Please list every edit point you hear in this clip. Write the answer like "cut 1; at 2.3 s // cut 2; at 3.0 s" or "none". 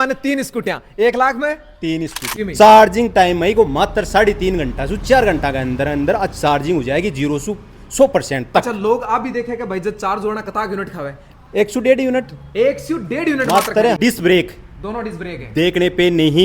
cut 1; at 2.2 s // cut 2; at 14.0 s